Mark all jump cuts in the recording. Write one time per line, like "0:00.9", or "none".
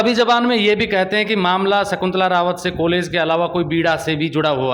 none